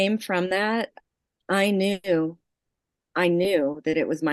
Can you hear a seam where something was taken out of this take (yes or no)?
yes